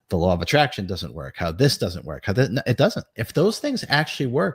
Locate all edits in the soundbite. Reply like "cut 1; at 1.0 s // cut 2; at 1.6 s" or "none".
cut 1; at 3.1 s